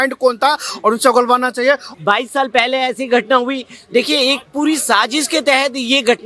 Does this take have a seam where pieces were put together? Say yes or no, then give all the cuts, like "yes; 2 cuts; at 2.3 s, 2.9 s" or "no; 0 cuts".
yes; 1 cut; at 1.9 s